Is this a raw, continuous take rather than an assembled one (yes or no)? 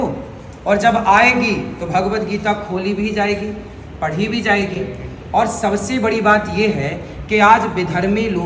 yes